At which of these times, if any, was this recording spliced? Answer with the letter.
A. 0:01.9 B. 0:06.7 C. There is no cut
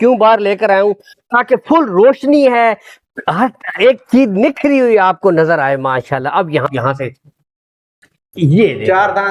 B